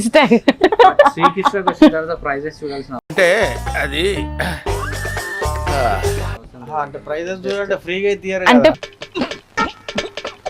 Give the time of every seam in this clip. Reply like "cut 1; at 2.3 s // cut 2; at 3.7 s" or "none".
none